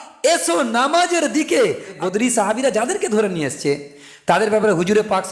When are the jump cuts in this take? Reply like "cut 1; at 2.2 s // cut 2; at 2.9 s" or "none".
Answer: cut 1; at 1.9 s

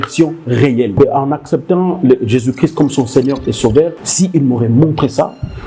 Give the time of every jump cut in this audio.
cut 1; at 0.9 s // cut 2; at 4.0 s

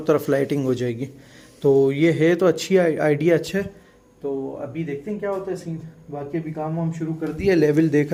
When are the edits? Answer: none

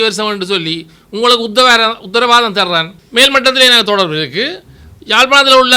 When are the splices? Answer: cut 1; at 3.0 s

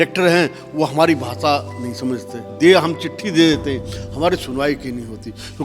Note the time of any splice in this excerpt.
cut 1; at 2.5 s

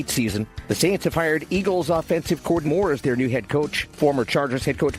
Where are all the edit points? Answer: cut 1; at 2.7 s

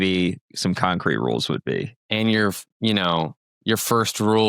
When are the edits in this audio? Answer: cut 1; at 2.0 s

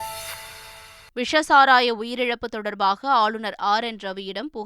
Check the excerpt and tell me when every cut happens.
cut 1; at 0.9 s

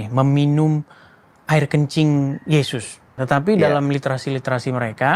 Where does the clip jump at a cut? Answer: cut 1; at 3.1 s

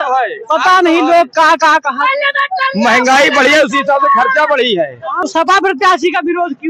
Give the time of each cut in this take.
cut 1; at 5.1 s

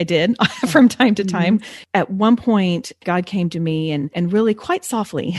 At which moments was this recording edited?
cut 1; at 1.8 s // cut 2; at 3.0 s // cut 3; at 4.1 s

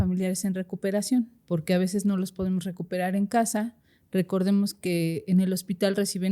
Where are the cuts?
cut 1; at 1.4 s

